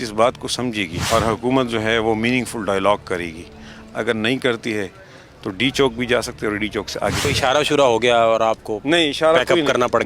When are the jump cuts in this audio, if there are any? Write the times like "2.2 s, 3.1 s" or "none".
0.9 s, 7.2 s